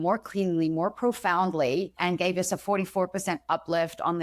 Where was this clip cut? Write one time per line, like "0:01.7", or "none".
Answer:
0:01.9